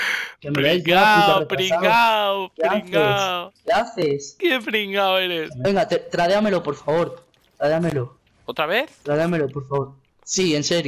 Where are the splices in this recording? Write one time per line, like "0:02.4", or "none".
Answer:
0:05.5

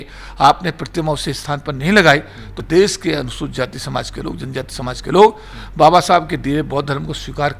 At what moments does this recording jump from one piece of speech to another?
0:02.6

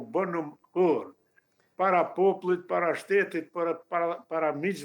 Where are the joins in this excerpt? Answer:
none

